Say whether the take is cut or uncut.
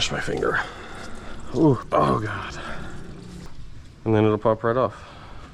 cut